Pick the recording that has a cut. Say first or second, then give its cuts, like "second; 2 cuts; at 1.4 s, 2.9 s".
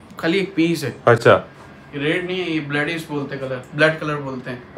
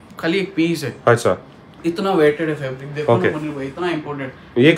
first; 1 cut; at 1.2 s